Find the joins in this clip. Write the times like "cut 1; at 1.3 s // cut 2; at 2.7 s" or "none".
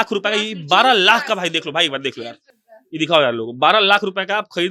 none